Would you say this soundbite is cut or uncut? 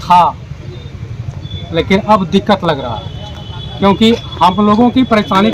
uncut